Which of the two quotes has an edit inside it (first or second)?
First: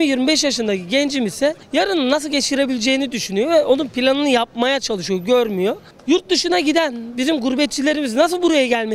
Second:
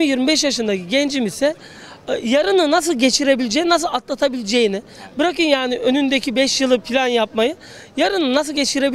first